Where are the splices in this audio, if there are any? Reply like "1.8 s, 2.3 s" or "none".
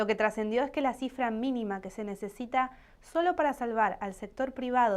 1.1 s